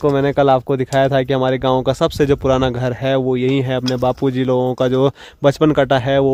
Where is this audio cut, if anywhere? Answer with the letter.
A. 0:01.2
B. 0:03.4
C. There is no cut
C